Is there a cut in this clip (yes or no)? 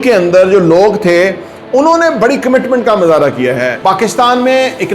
yes